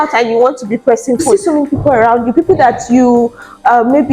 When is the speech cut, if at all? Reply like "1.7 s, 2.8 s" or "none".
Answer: 1.2 s